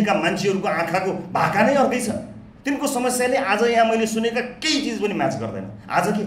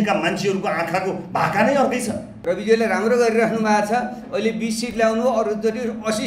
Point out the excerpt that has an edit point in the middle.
second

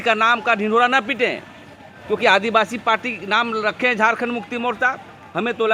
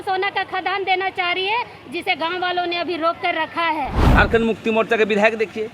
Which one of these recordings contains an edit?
second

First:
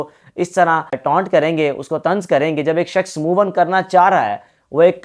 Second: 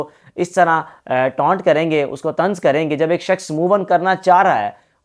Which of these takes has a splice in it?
first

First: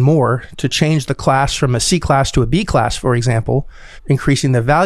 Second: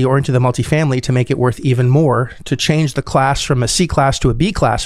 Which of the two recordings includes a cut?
first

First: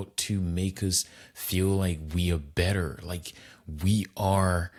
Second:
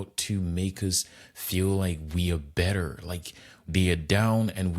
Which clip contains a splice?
second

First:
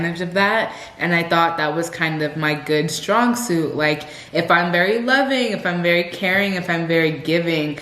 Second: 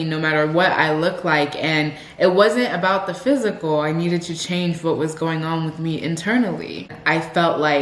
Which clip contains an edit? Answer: second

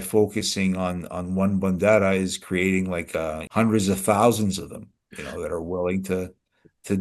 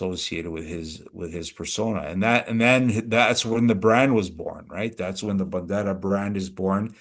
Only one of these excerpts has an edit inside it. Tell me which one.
first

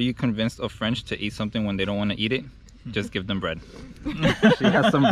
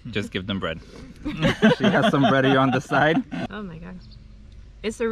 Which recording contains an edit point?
second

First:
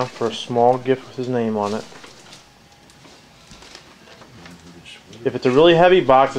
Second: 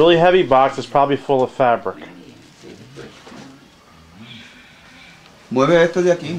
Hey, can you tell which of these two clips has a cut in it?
first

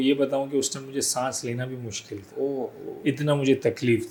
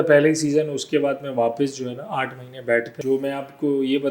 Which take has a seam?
second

